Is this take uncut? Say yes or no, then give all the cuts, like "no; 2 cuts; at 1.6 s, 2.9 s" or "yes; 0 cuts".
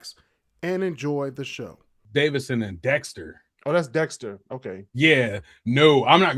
no; 1 cut; at 2.0 s